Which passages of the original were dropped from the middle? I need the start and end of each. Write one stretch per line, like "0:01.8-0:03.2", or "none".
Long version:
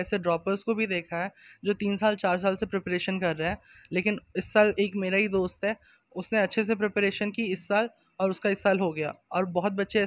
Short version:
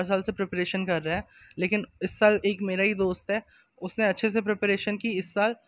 none